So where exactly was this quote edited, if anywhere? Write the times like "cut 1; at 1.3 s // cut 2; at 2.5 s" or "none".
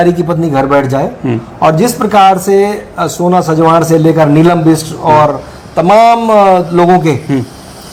none